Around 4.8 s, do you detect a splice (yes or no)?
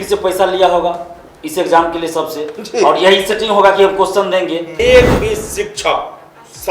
yes